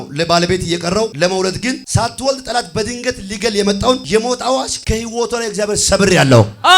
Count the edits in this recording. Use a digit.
4